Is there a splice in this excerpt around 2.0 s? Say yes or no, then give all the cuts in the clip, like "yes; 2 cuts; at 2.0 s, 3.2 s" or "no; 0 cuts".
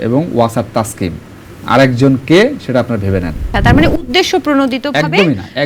no; 1 cut; at 3.5 s